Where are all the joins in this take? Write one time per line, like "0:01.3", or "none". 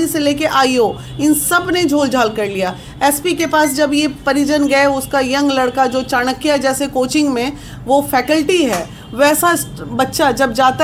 none

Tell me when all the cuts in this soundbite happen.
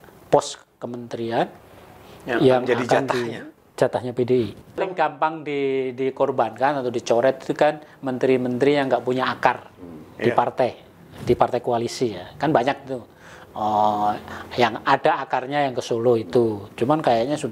0:04.8

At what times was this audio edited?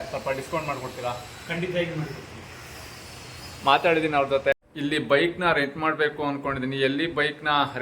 0:04.5

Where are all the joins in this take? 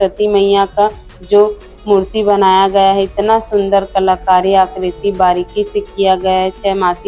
none

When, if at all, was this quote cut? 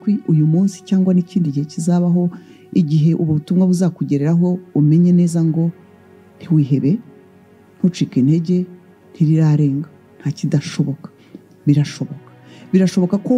none

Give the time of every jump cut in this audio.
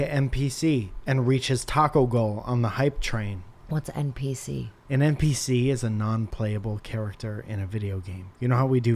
0:00.9
0:03.5
0:04.7

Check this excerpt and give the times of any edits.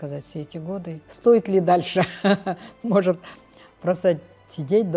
0:01.0

